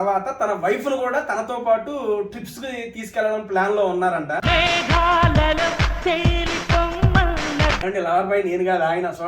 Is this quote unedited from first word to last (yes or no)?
no